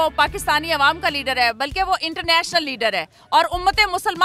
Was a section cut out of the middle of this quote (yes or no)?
no